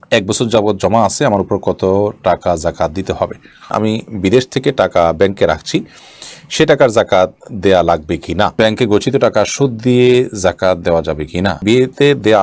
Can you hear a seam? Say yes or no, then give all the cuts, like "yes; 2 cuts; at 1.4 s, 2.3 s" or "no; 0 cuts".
yes; 3 cuts; at 3.7 s, 8.6 s, 11.6 s